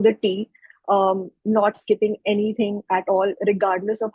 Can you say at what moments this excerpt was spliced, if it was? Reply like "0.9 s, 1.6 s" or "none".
none